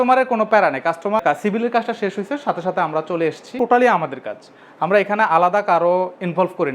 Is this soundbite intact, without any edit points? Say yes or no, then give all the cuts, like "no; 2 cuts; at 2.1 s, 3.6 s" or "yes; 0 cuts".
no; 2 cuts; at 1.2 s, 3.5 s